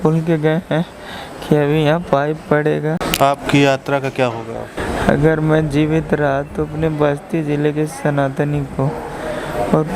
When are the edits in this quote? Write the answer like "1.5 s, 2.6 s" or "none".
3.1 s, 4.8 s

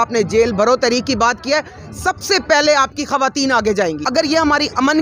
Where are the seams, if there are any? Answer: 4.0 s

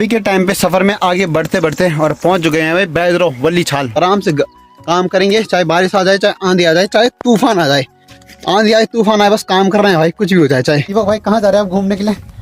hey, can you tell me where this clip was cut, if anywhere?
4.0 s, 10.9 s

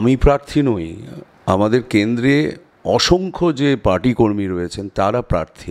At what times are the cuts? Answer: none

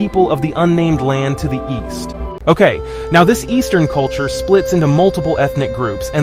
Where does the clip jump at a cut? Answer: none

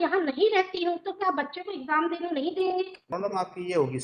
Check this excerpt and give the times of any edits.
3.0 s

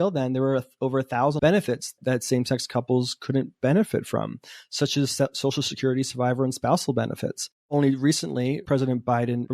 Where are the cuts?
1.4 s

